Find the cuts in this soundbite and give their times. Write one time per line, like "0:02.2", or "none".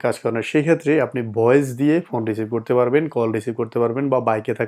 none